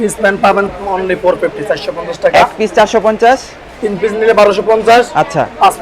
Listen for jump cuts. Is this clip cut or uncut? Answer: uncut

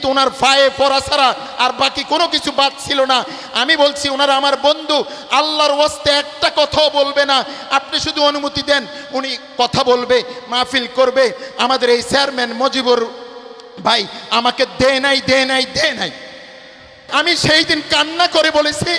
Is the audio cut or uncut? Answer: cut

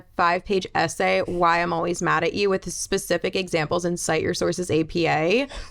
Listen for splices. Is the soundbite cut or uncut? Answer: uncut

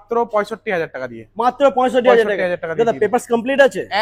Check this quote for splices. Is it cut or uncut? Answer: uncut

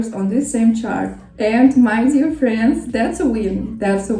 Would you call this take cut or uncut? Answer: cut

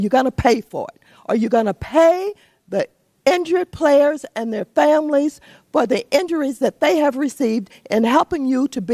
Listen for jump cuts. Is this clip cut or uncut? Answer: uncut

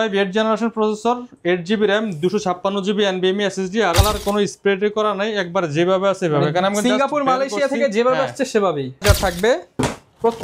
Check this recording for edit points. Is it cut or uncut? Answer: cut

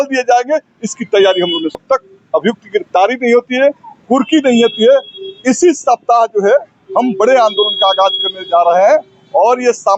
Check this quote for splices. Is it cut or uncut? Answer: cut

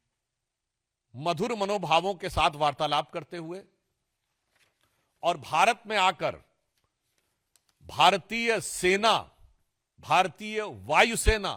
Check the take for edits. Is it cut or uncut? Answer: uncut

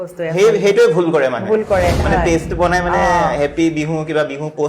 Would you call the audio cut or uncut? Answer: cut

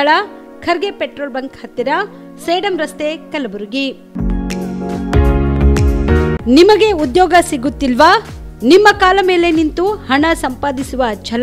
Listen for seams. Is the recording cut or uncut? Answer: cut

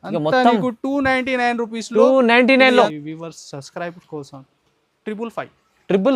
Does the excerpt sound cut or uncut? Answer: cut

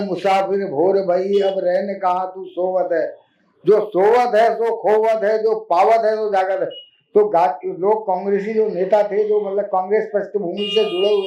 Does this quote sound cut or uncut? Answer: uncut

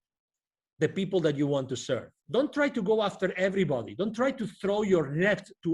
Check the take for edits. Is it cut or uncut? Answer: cut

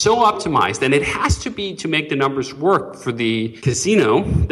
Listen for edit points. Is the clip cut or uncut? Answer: cut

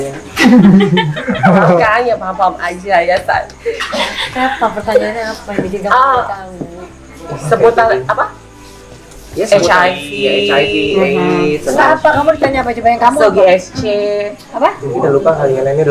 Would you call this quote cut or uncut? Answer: uncut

